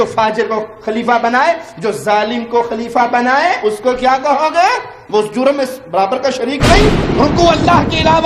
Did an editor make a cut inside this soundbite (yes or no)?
yes